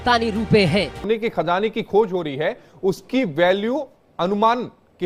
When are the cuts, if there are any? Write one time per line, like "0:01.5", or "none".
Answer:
0:01.0